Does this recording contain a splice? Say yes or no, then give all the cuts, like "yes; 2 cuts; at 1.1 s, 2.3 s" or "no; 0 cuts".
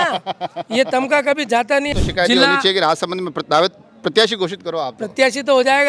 yes; 1 cut; at 1.9 s